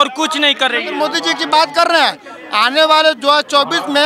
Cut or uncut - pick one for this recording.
cut